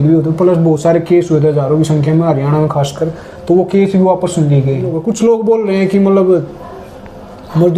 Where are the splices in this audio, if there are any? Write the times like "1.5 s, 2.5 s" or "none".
5.0 s